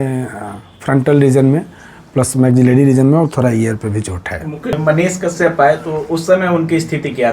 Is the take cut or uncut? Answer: cut